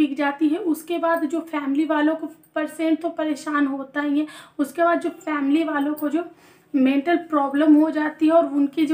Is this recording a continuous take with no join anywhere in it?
yes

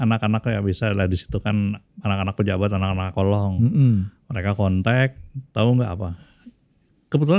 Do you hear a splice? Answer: no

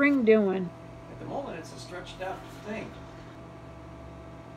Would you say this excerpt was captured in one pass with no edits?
no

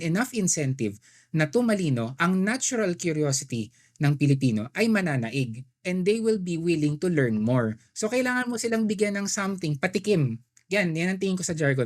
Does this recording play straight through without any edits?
yes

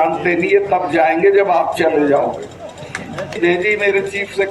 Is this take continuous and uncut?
no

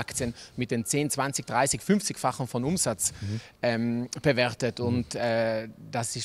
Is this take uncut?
yes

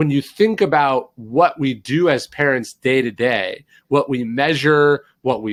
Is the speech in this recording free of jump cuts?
yes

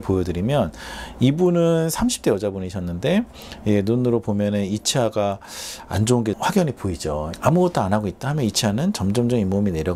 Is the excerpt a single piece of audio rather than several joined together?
yes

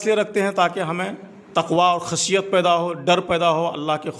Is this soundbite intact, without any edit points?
yes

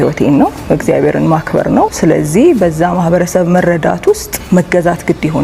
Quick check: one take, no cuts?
no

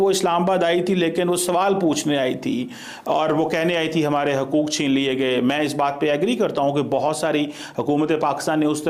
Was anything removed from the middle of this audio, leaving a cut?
no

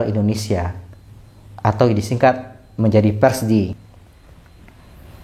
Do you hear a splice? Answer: yes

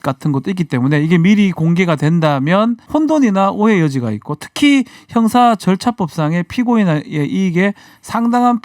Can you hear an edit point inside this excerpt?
yes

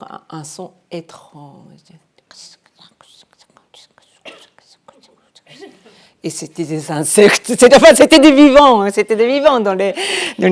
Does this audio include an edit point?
no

